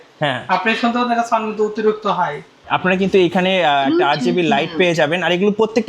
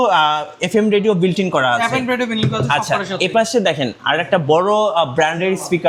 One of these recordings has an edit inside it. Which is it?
first; 1 cut; at 2.6 s

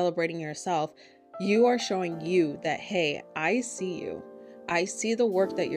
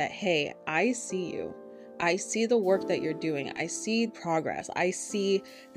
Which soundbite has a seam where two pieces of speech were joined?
second; 1 cut; at 4.1 s

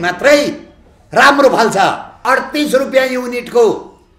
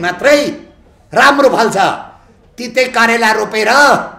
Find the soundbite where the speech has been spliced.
first; 1 cut; at 2.2 s

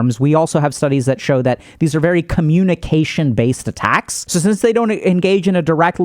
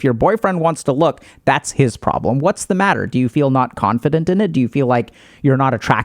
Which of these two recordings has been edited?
first; 1 cut; at 4.2 s

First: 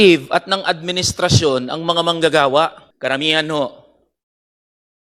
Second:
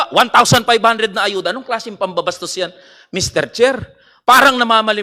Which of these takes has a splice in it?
first; 1 cut; at 2.9 s

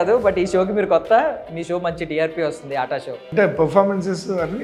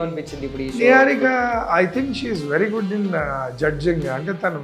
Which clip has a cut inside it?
first; 1 cut; at 3.2 s

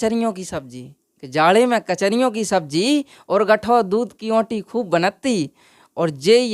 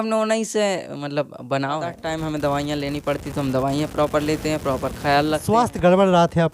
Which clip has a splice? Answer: second; 2 cuts; at 2.0 s, 5.6 s

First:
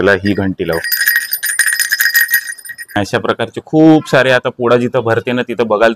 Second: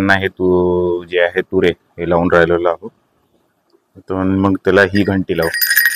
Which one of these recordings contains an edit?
first; 1 cut; at 3.0 s

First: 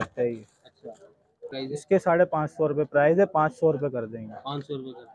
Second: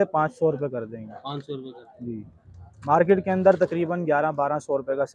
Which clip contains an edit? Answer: first; 1 cut; at 1.5 s

